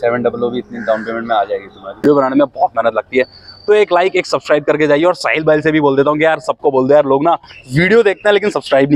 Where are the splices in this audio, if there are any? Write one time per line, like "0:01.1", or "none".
0:02.0